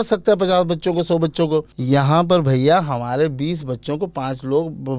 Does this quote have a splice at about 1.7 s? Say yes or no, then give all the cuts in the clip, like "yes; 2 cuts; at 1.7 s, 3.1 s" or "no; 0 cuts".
yes; 1 cut; at 1.7 s